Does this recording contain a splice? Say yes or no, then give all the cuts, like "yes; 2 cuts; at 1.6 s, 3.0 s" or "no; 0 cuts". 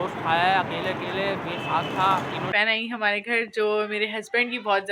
yes; 1 cut; at 2.5 s